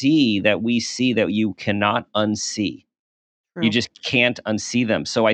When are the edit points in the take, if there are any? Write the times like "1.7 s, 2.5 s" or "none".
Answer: none

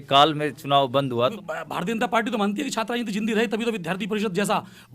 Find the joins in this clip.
1.3 s

